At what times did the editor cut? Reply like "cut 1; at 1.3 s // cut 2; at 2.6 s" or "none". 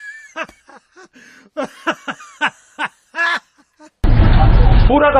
cut 1; at 0.9 s